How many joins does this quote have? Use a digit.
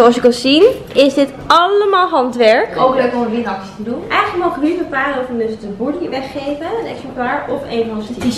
2